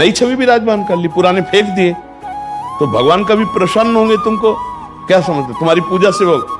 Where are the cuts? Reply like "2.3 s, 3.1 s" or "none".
none